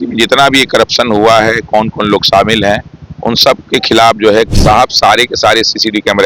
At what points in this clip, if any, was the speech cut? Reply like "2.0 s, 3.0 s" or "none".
4.6 s